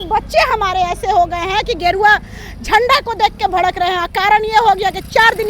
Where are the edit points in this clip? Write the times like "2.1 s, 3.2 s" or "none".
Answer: none